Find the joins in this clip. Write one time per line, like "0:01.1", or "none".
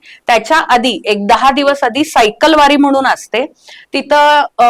none